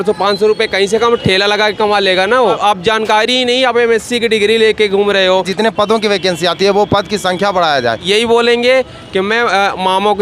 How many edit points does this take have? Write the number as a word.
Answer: three